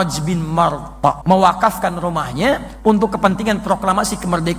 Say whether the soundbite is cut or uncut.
cut